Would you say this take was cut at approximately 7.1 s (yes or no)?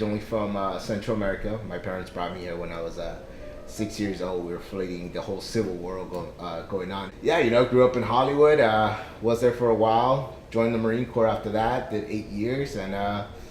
yes